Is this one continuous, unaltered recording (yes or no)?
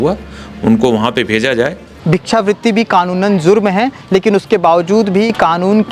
no